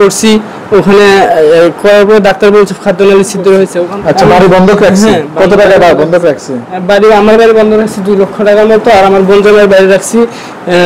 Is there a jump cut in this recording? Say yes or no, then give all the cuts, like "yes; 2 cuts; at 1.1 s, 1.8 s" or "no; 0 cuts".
yes; 1 cut; at 3.9 s